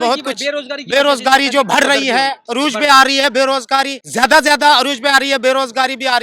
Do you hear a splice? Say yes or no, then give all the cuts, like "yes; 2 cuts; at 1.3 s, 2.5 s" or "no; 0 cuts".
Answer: yes; 1 cut; at 4.0 s